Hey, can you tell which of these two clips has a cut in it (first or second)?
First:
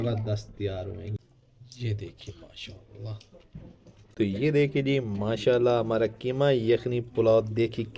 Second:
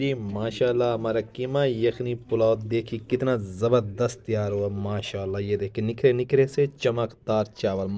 first